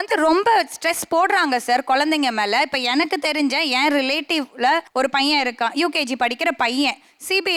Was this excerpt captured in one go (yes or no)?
yes